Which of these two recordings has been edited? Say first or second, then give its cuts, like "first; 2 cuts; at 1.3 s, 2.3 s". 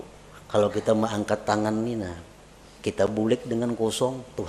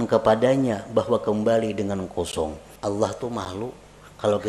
second; 1 cut; at 2.7 s